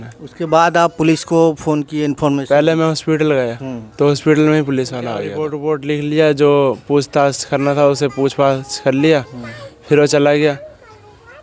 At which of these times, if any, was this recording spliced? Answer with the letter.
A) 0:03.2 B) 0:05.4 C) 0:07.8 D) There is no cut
B